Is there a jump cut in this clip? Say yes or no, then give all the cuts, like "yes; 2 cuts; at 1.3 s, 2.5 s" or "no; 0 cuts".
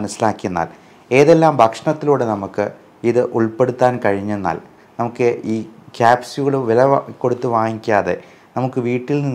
no; 0 cuts